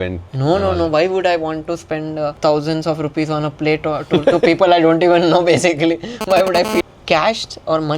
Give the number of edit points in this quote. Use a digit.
2